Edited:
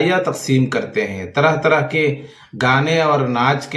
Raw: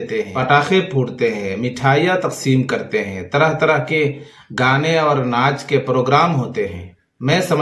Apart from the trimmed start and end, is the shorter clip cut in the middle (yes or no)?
no